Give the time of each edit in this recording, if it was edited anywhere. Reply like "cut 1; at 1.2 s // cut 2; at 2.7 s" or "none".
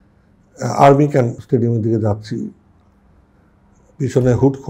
cut 1; at 1.4 s

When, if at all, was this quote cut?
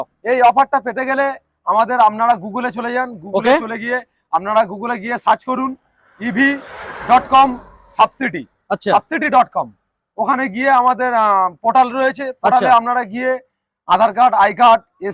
none

